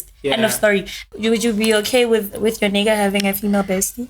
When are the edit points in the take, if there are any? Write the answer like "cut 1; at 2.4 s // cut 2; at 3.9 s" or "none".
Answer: cut 1; at 1.1 s